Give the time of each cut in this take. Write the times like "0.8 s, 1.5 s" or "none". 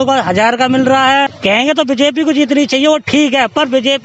1.3 s

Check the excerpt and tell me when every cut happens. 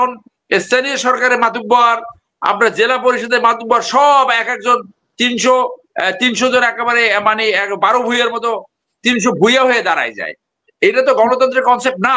none

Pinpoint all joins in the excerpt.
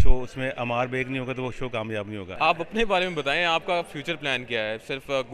2.3 s

